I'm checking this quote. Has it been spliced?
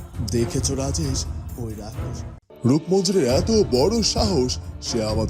yes; 1 cut; at 2.4 s

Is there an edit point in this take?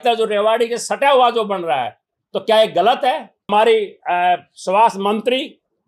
yes; 1 cut; at 3.5 s

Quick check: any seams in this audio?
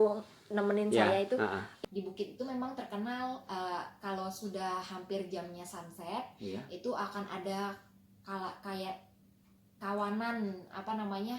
yes; 1 cut; at 1.7 s

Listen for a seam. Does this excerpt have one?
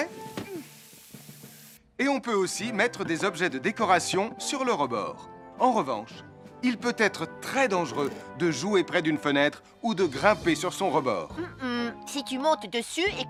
no; 0 cuts

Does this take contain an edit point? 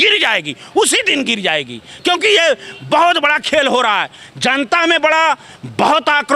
no; 0 cuts

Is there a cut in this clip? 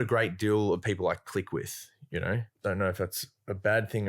yes; 1 cut; at 2.5 s

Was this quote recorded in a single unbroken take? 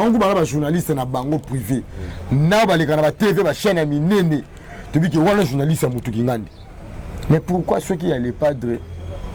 yes; 0 cuts

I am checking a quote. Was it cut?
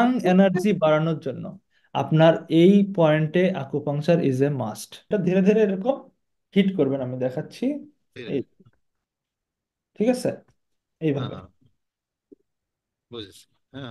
yes; 1 cut; at 5.0 s

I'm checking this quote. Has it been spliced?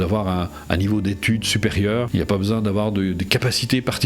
yes; 1 cut; at 2.1 s

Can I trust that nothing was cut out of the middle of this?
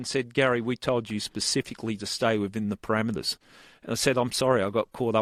yes; 0 cuts

